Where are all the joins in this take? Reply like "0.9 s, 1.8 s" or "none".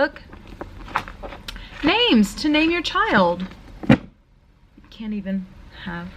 none